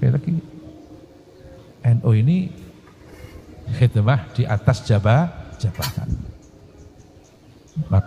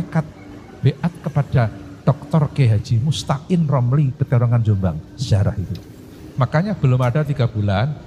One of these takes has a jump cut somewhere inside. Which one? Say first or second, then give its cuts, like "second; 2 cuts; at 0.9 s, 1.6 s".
second; 1 cut; at 6.2 s